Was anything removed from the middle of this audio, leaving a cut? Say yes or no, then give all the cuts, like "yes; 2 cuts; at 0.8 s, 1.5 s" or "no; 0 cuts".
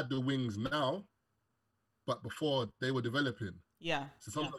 no; 0 cuts